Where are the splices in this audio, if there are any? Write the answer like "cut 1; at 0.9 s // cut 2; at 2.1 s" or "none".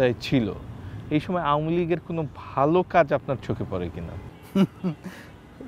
none

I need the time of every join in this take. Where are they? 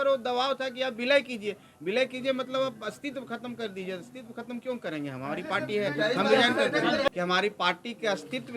cut 1; at 7.1 s

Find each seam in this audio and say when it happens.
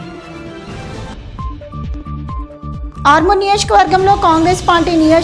cut 1; at 1.0 s

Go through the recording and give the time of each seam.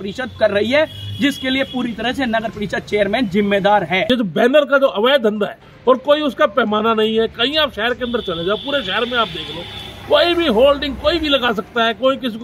cut 1; at 4.1 s // cut 2; at 5.7 s

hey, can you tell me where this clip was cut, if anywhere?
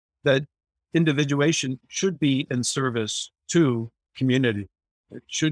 cut 1; at 1.7 s

